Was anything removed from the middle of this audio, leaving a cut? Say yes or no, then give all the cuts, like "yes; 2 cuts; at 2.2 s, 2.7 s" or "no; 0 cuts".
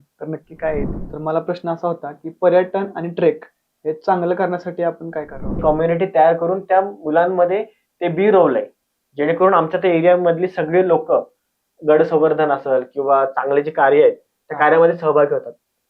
yes; 2 cuts; at 1.1 s, 5.6 s